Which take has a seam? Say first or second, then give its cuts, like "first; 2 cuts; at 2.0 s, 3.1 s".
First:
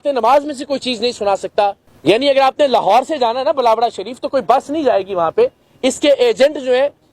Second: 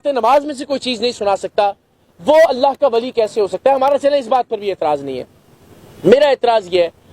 first; 1 cut; at 1.9 s